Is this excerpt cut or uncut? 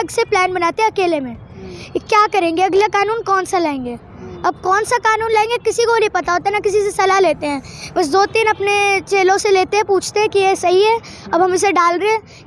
uncut